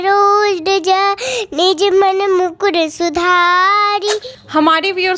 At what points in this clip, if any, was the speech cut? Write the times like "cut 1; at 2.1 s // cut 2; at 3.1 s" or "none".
cut 1; at 4.2 s